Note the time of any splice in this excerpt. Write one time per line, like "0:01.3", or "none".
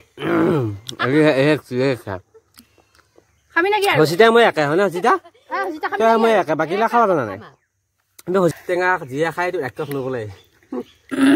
0:08.5